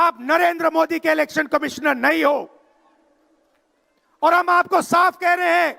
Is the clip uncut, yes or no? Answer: yes